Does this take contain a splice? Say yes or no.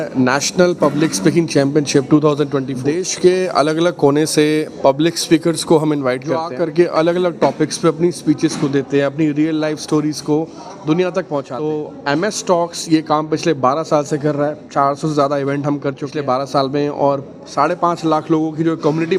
yes